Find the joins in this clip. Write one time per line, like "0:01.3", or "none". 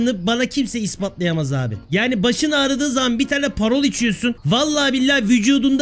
0:01.8
0:04.4